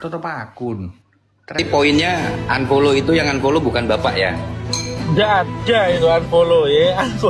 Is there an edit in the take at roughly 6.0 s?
no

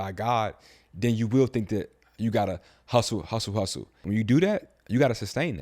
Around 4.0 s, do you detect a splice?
yes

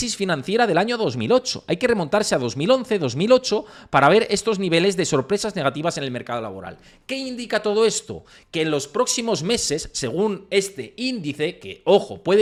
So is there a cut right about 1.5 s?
no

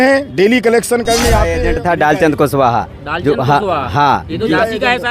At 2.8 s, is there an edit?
no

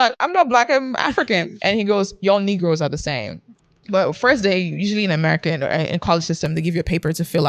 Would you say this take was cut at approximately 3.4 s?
no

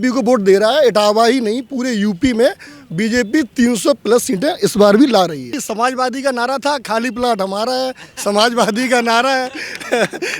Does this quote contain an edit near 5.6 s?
yes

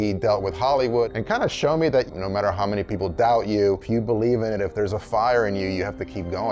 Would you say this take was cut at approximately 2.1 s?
yes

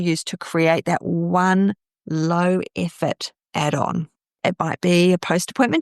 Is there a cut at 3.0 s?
no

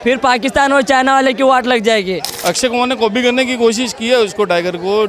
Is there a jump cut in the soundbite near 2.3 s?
yes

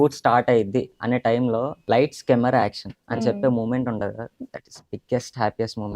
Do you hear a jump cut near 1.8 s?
yes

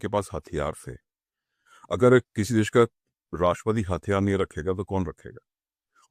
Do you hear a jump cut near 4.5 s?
no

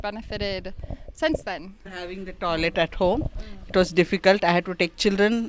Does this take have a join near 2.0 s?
yes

